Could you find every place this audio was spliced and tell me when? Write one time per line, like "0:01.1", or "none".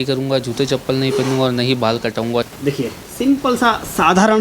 0:02.5